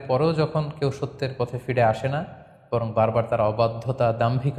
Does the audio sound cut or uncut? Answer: uncut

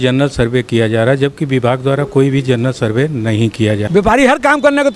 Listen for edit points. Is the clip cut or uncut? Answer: cut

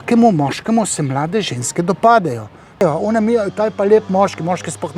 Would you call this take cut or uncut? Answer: cut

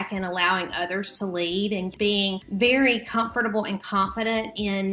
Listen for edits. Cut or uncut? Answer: cut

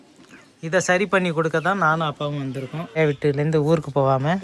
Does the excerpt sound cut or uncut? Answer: cut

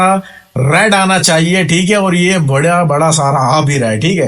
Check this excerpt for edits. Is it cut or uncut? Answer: uncut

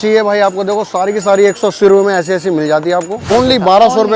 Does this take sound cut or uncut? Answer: cut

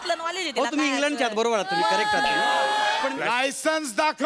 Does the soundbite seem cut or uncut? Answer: cut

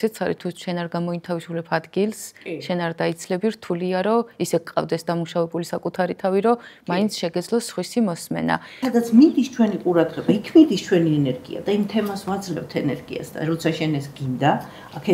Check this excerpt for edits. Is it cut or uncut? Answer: cut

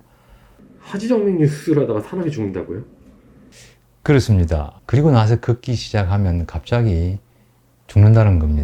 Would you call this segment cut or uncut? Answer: cut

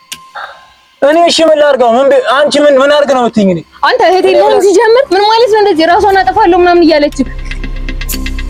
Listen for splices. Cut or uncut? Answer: uncut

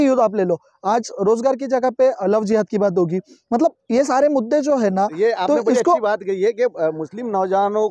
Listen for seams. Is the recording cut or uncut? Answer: uncut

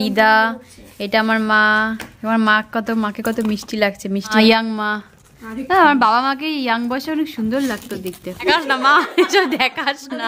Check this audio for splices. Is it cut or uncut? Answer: cut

